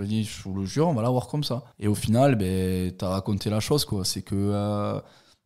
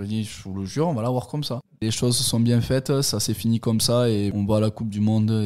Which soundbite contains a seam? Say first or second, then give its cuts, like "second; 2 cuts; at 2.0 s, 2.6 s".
second; 2 cuts; at 1.7 s, 4.3 s